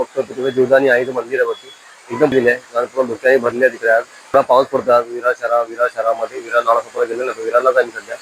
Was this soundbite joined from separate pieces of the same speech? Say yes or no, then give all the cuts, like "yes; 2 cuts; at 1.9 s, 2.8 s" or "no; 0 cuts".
no; 0 cuts